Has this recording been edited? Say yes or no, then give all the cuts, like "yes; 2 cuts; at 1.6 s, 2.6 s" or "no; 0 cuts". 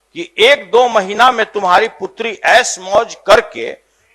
no; 0 cuts